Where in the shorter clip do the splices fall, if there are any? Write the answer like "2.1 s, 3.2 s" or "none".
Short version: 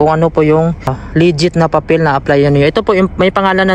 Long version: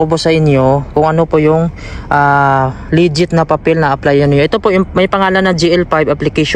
1.0 s

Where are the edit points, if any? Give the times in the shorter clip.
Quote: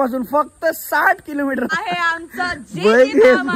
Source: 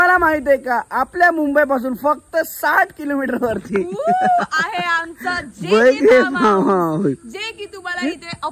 1.7 s

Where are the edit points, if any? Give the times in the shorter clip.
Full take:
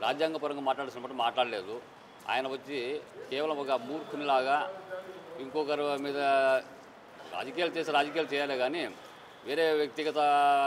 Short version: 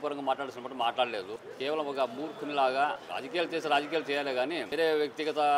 1.4 s, 3.1 s, 4.7 s

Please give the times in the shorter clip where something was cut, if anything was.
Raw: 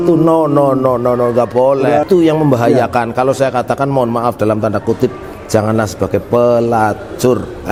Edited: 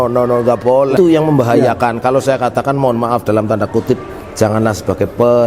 0.9 s

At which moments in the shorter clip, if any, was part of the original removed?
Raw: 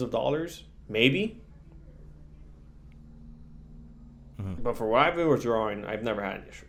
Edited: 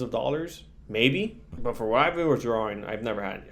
1.5 s

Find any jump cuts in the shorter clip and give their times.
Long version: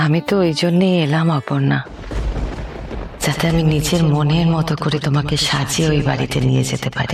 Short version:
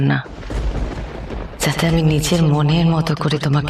none

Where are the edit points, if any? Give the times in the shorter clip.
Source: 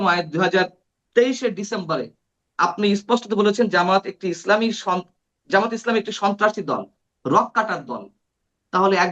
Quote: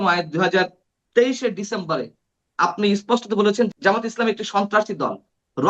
3.7 s

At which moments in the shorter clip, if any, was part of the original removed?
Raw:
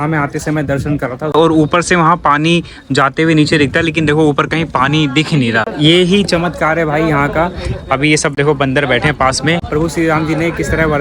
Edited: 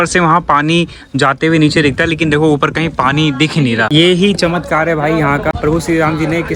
3.9 s, 5.5 s

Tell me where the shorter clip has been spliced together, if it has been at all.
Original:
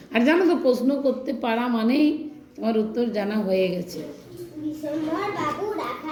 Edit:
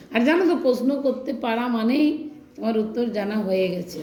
none

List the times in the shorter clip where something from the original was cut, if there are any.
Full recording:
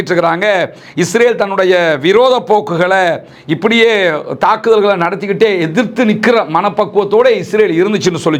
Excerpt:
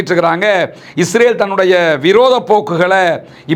none

